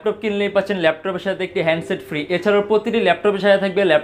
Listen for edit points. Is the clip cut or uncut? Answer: uncut